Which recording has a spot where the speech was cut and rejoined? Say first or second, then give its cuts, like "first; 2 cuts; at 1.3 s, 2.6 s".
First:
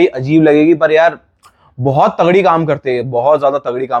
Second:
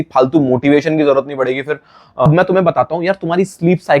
second; 1 cut; at 2.3 s